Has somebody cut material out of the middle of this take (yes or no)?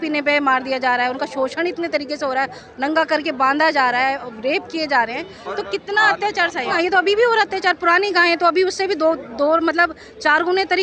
no